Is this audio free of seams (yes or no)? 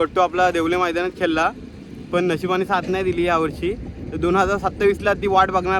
yes